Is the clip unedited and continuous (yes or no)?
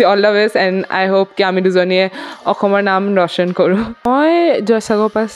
no